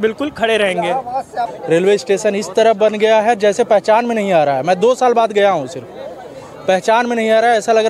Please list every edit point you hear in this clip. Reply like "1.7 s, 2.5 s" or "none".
1.5 s